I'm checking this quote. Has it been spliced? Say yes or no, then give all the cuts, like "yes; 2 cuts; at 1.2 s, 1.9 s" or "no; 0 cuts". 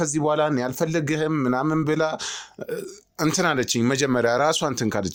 no; 0 cuts